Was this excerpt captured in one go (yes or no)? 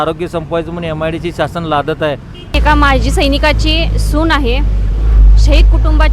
no